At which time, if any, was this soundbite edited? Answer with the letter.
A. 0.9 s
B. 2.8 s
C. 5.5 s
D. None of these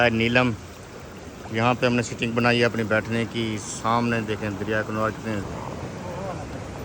C